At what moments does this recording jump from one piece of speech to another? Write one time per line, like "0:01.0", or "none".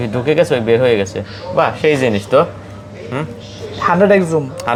none

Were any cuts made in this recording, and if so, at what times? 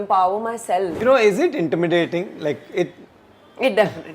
0:00.9

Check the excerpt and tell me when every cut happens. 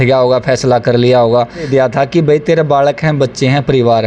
0:01.7

